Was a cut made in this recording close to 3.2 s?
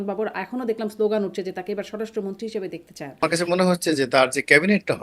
yes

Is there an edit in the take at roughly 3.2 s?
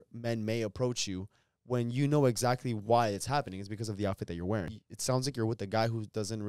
no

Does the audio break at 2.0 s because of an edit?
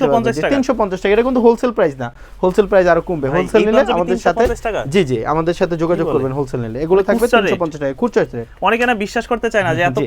no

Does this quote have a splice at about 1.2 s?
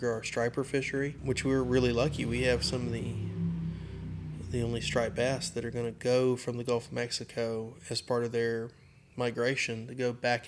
yes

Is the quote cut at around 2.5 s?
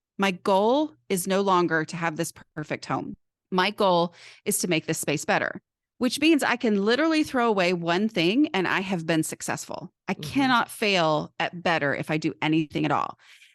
yes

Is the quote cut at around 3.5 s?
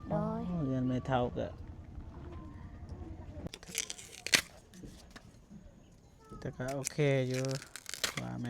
yes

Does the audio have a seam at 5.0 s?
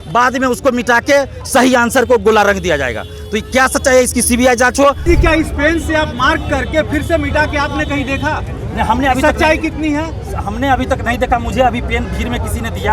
yes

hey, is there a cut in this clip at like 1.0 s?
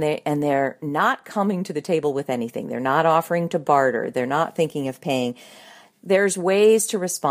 no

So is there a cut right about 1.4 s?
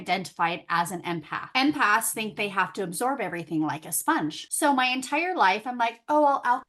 yes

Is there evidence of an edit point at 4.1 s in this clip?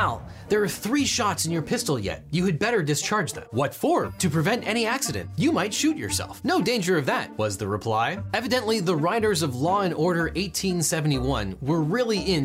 yes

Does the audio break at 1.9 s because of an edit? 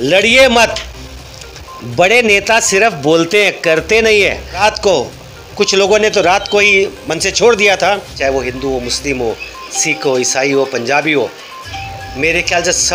no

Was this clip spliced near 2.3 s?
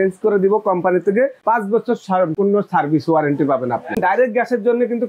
yes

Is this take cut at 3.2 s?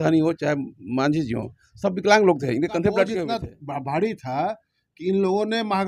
yes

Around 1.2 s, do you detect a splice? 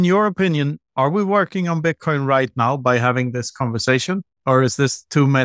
no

